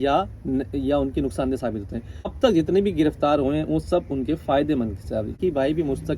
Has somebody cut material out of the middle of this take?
yes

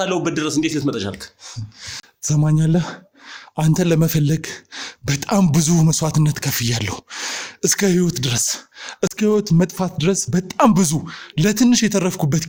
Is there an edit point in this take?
no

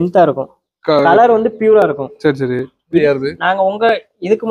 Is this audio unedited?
no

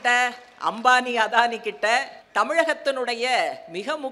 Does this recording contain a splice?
yes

